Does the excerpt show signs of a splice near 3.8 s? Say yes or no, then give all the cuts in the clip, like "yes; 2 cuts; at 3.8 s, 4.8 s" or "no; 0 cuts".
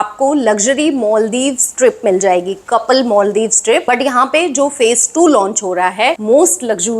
yes; 2 cuts; at 3.8 s, 6.2 s